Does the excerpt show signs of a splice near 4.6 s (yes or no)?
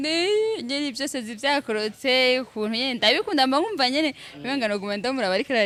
no